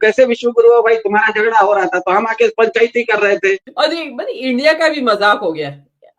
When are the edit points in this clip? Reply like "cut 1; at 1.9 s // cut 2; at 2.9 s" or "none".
cut 1; at 3.7 s